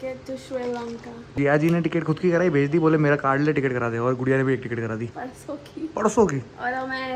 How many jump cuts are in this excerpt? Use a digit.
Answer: 2